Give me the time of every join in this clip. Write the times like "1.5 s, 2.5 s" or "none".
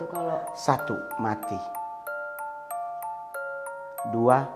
none